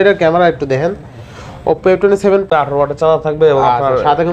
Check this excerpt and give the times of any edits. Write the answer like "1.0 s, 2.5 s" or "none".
2.5 s